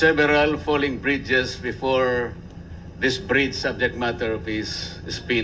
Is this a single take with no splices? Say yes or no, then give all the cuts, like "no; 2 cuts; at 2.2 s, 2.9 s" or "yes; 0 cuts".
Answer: no; 1 cut; at 4.4 s